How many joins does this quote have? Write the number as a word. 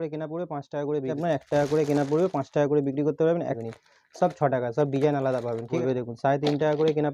three